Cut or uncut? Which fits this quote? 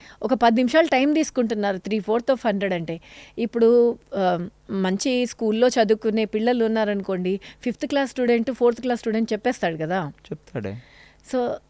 uncut